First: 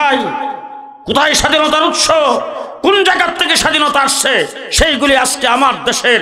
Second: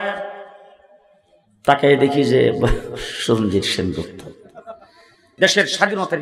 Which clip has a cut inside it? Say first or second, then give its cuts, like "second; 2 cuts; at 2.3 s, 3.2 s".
second; 1 cut; at 5.2 s